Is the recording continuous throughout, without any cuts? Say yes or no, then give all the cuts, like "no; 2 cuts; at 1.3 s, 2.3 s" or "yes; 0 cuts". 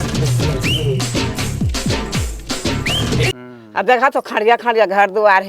no; 2 cuts; at 2.1 s, 3.7 s